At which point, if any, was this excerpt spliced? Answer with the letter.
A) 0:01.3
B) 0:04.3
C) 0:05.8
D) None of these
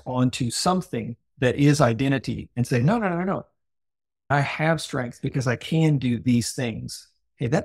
B